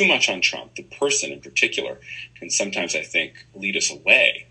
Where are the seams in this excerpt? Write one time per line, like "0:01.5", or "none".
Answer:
0:03.4